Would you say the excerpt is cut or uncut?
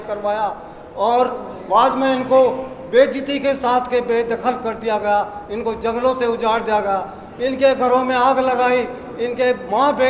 uncut